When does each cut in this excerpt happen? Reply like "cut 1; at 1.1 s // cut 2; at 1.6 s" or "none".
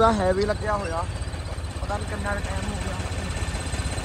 none

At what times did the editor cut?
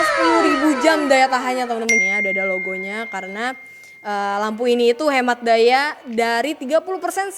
cut 1; at 2.0 s

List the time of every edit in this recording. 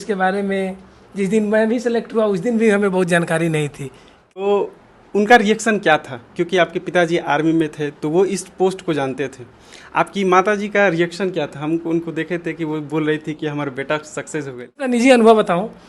cut 1; at 4.4 s // cut 2; at 14.9 s

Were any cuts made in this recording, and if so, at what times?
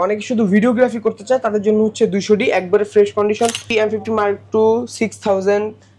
cut 1; at 3.6 s

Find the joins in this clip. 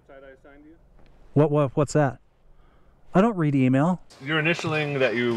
cut 1; at 4.1 s

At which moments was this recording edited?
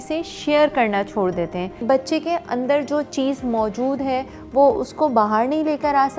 cut 1; at 1.8 s

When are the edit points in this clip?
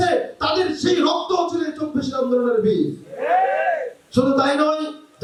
none

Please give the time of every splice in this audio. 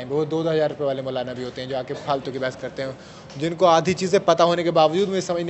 none

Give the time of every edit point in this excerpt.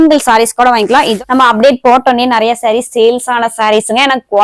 cut 1; at 1.1 s

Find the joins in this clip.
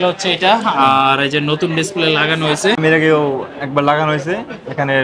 cut 1; at 2.8 s

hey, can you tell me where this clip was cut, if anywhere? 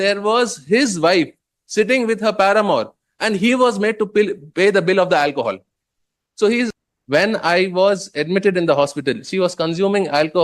cut 1; at 6.8 s

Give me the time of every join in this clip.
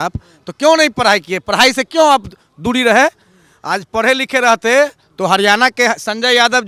none

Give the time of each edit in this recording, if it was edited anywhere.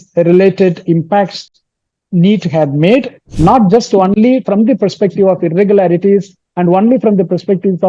cut 1; at 3.2 s

